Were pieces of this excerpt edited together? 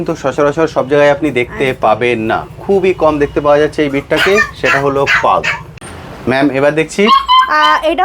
yes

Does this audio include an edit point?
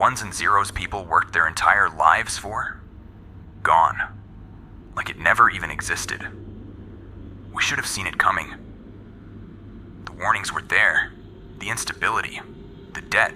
yes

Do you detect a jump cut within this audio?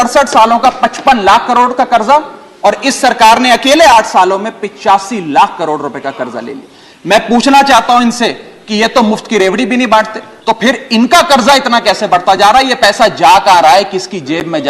yes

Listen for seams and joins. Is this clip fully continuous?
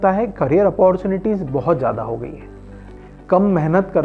no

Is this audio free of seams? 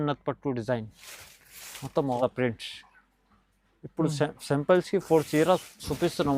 no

